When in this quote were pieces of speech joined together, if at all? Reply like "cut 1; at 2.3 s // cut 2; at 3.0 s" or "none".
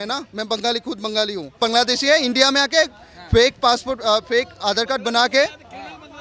cut 1; at 1.6 s